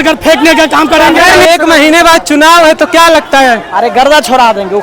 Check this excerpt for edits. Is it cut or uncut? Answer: cut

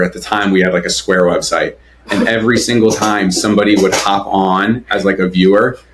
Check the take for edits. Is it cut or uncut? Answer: uncut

